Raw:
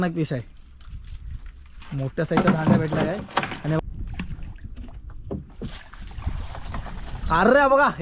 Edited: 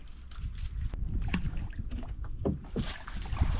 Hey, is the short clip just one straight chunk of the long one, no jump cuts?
no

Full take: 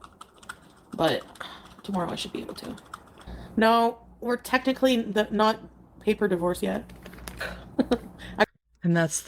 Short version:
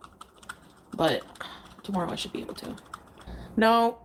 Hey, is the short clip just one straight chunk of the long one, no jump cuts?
yes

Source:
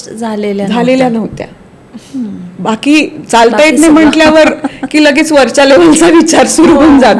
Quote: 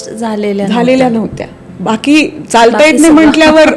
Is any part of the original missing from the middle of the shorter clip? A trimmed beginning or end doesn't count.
yes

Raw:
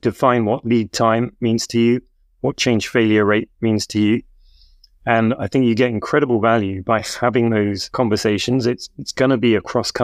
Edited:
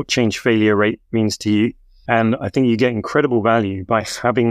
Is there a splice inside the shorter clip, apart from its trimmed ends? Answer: yes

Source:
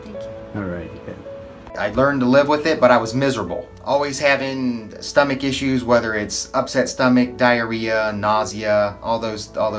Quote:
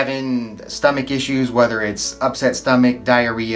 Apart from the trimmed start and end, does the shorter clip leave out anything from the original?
no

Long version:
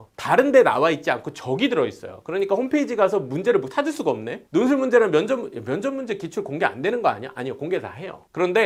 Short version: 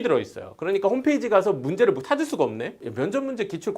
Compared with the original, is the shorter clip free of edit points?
no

